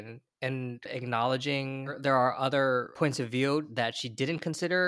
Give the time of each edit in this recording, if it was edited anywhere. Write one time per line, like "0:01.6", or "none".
0:01.8
0:02.9
0:03.7